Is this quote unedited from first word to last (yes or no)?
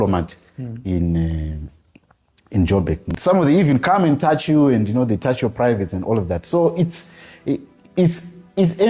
no